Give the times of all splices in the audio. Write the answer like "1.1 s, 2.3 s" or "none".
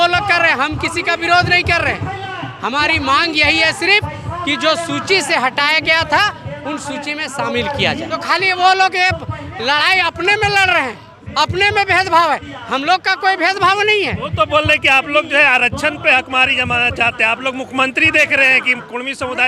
8.1 s